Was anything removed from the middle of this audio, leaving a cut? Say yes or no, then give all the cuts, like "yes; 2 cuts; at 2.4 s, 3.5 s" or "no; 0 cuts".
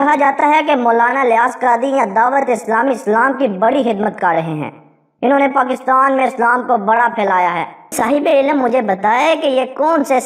yes; 1 cut; at 7.9 s